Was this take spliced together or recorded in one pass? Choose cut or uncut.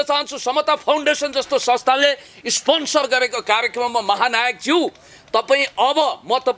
uncut